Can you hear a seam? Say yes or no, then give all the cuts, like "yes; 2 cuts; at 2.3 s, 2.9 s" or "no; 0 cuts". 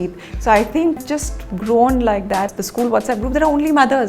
yes; 2 cuts; at 1.0 s, 2.5 s